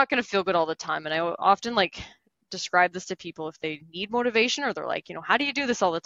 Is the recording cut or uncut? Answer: uncut